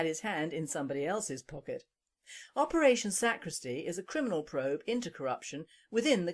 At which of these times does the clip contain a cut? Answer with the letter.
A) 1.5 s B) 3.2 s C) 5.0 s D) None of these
A